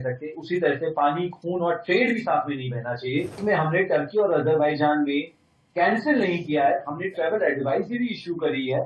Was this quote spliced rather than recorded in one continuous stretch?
yes; 1 cut; at 3.4 s

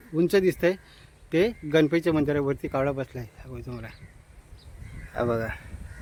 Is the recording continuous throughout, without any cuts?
yes; 0 cuts

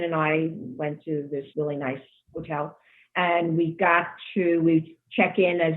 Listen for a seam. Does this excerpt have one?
yes; 1 cut; at 1.3 s

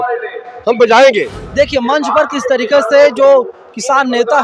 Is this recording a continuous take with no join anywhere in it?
no; 1 cut; at 1.4 s

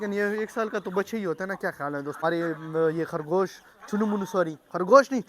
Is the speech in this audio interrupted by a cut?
yes; 1 cut; at 2.2 s

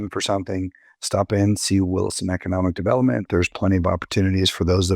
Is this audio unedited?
no; 1 cut; at 3.3 s

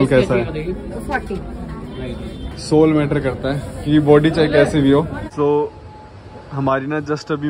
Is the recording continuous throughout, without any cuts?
no; 1 cut; at 5.2 s

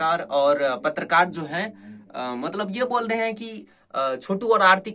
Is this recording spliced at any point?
no; 0 cuts

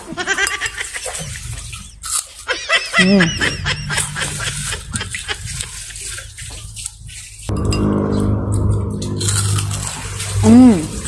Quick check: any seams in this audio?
yes; 1 cut; at 7.5 s

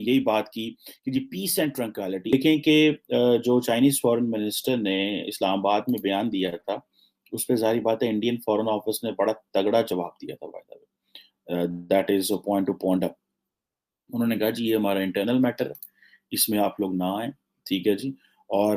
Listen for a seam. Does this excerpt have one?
yes; 1 cut; at 2.3 s

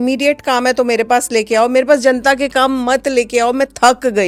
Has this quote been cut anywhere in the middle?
no; 0 cuts

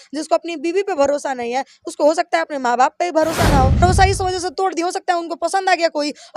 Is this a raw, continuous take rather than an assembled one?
no; 1 cut; at 3.8 s

